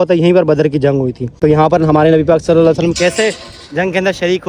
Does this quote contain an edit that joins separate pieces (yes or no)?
yes